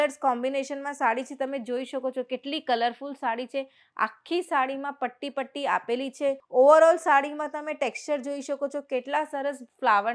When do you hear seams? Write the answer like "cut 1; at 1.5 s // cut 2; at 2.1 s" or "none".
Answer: cut 1; at 6.4 s